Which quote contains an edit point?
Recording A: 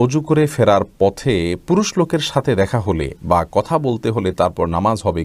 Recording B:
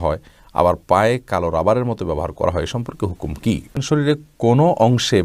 B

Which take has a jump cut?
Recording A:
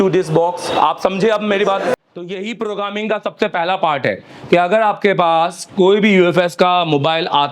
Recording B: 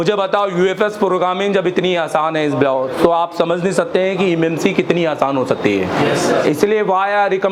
A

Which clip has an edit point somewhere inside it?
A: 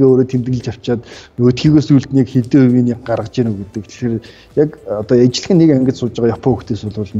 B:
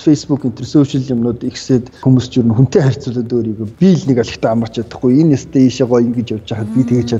B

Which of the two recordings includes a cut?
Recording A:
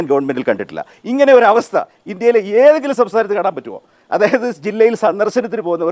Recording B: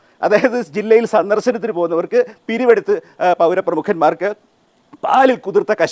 A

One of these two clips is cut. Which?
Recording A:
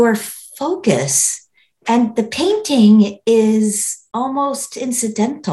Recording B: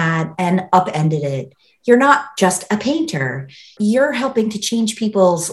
B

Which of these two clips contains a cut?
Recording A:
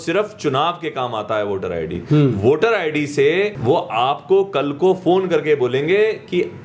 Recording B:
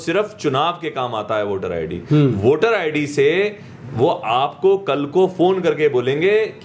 A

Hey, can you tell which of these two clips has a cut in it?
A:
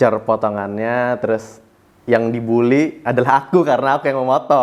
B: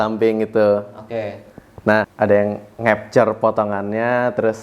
B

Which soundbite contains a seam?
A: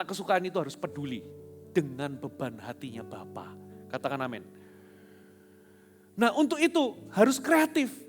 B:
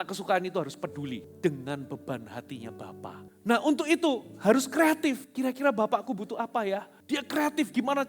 B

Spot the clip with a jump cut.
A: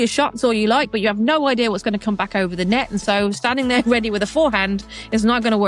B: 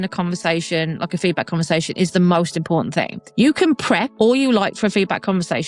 B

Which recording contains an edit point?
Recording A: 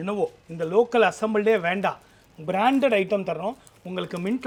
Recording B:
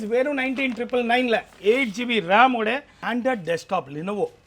B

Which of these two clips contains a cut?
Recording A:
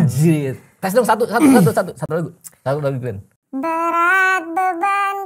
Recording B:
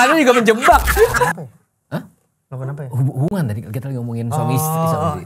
B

